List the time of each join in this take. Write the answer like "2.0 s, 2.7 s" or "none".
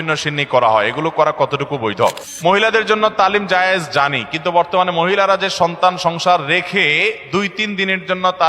2.3 s